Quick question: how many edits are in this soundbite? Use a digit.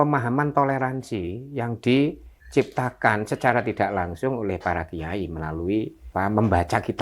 1